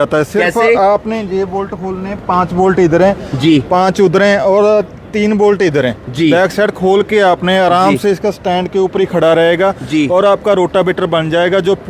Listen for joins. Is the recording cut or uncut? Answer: uncut